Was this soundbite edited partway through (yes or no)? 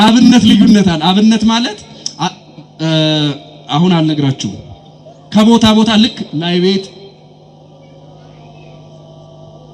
no